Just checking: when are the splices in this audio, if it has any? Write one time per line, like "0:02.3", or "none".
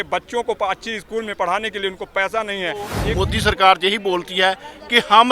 0:03.0